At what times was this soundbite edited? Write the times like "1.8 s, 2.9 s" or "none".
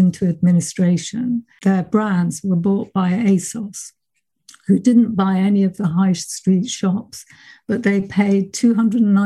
1.5 s